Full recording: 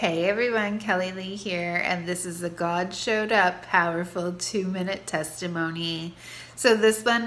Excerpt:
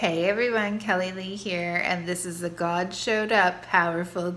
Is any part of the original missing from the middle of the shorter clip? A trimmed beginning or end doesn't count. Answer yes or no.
no